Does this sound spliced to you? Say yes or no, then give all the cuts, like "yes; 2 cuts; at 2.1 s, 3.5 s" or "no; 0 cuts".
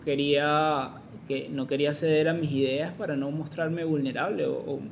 no; 0 cuts